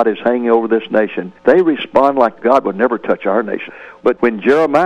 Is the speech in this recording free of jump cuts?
no; 3 cuts; at 1.2 s, 2.4 s, 3.6 s

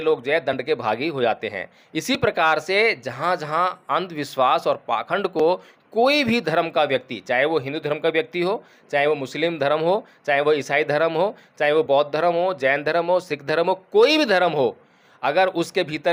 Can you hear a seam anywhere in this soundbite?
no; 0 cuts

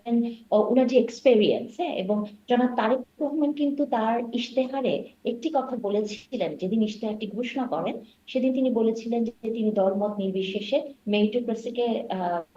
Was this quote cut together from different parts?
no; 0 cuts

